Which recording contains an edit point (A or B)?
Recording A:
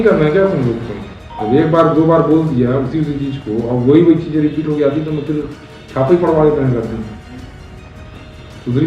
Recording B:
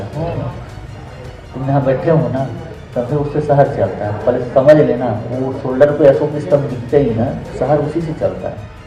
A